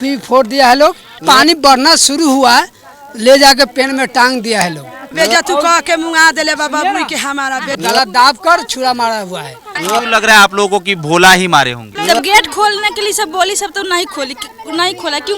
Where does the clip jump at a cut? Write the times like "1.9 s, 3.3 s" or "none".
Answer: 1.2 s, 5.1 s, 7.8 s, 9.8 s, 11.9 s